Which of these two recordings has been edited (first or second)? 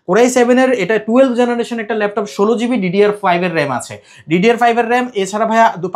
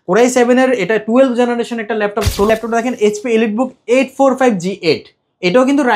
second